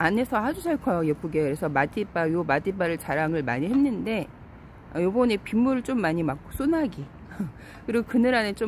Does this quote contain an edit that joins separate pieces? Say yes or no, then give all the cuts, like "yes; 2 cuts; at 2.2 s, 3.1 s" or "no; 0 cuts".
no; 0 cuts